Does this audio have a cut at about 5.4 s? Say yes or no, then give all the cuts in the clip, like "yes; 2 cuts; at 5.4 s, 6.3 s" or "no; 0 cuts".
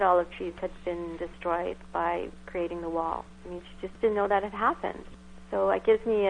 no; 1 cut; at 3.9 s